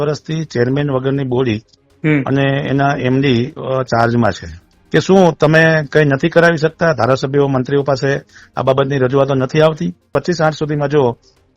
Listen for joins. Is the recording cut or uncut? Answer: cut